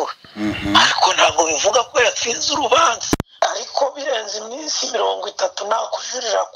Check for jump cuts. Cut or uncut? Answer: cut